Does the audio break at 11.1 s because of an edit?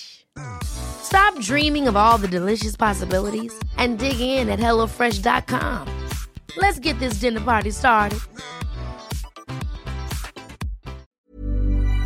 yes; 1 cut; at 11.1 s

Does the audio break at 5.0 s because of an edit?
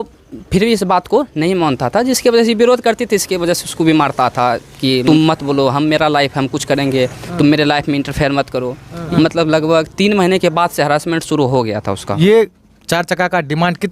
yes; 3 cuts; at 5.0 s, 9.0 s, 12.2 s

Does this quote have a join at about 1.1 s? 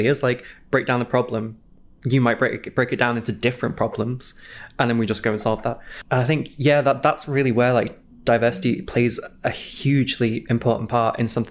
no; 2 cuts; at 5.9 s, 9.7 s

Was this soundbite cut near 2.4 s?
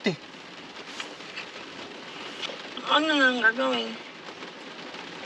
yes; 1 cut; at 2.4 s

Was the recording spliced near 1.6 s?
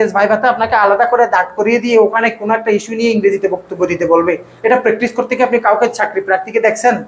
no; 0 cuts

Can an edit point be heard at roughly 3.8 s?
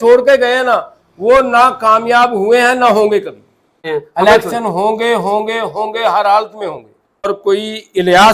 yes; 2 cuts; at 3.8 s, 7.3 s

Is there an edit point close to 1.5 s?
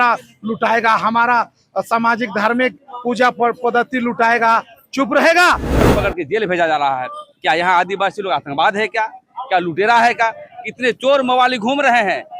no; 1 cut; at 5.9 s

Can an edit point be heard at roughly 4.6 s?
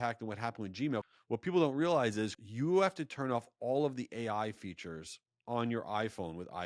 no; 2 cuts; at 1.1 s, 2.4 s

